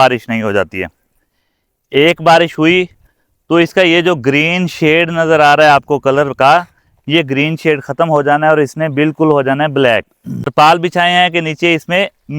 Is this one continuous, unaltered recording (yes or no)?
no